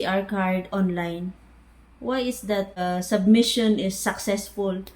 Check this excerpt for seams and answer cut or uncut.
cut